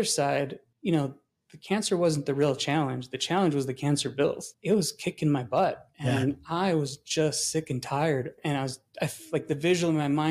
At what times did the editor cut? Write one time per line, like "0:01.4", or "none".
0:04.5
0:08.3